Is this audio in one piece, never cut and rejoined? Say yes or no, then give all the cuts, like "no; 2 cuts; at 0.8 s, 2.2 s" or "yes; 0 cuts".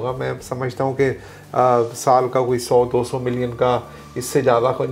yes; 0 cuts